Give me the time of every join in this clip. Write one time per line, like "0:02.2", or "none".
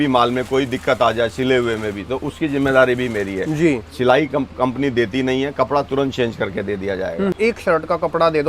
0:07.3